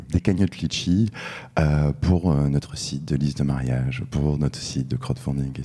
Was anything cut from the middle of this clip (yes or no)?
no